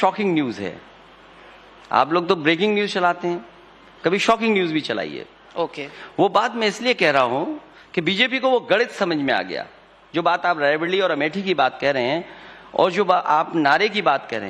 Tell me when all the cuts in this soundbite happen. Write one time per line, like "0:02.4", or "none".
0:02.1